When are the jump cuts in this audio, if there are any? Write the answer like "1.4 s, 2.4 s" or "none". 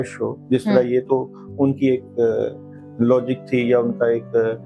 none